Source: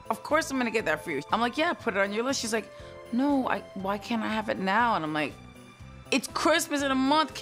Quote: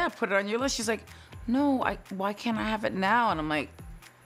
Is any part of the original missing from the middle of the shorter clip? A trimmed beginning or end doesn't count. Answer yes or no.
no